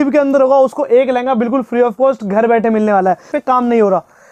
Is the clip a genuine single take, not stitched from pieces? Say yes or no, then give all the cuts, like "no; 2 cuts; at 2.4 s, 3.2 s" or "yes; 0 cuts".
no; 1 cut; at 3.2 s